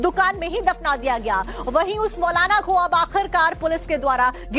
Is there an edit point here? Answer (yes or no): yes